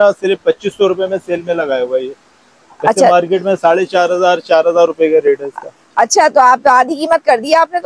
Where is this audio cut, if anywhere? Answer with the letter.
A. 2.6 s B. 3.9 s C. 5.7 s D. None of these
D